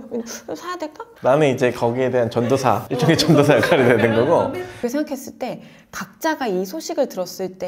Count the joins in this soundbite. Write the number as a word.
two